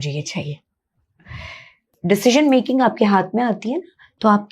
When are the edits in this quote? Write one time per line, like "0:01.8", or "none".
0:01.9